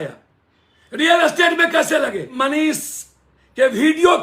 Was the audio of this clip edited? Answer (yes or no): yes